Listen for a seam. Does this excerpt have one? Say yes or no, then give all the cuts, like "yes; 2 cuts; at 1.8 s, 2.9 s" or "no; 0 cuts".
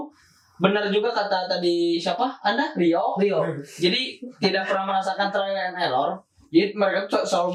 no; 0 cuts